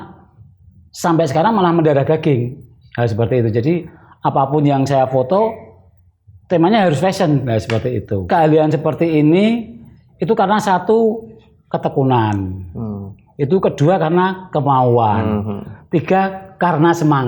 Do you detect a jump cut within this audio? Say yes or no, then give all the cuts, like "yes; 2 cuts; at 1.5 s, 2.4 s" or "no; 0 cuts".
yes; 1 cut; at 8.2 s